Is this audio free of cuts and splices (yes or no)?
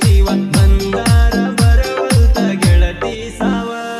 no